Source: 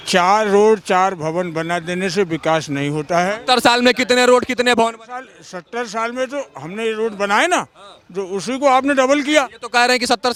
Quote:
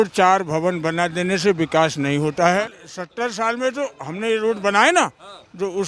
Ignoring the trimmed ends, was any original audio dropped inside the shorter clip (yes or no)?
yes